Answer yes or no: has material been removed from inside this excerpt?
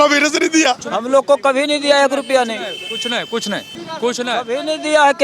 yes